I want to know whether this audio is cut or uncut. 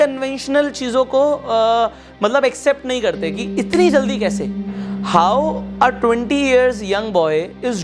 uncut